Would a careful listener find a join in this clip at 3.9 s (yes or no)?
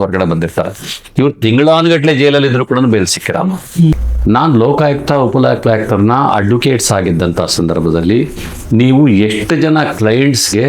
yes